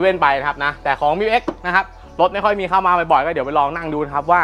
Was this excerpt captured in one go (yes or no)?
yes